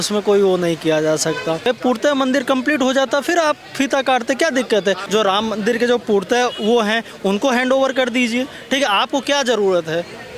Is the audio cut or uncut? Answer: cut